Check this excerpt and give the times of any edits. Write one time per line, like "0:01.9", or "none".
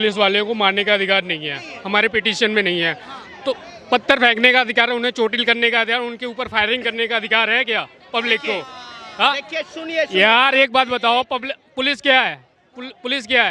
none